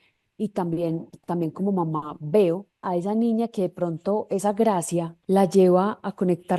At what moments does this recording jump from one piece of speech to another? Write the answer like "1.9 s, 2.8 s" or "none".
2.8 s, 5.1 s